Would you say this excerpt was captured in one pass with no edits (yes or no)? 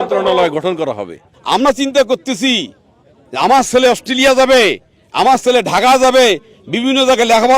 no